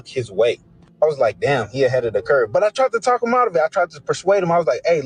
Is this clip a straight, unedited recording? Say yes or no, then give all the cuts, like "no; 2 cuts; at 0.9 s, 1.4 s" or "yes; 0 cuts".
no; 1 cut; at 3.6 s